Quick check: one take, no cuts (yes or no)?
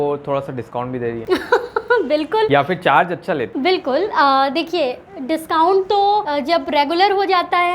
yes